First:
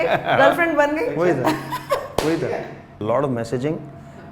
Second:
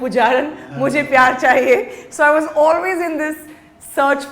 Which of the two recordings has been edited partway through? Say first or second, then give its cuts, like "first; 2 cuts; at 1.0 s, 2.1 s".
first; 1 cut; at 3.0 s